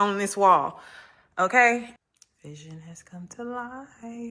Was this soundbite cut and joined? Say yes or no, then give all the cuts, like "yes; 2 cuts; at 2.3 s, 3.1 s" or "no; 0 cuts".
yes; 1 cut; at 1.8 s